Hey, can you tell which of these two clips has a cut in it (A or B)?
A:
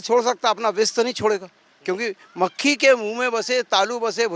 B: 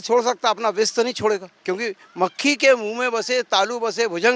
B